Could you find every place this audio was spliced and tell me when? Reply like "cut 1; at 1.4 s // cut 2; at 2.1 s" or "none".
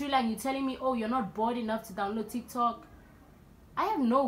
none